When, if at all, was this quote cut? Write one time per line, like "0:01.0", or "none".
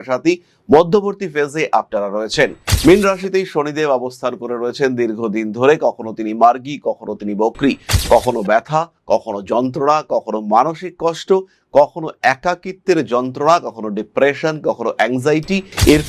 none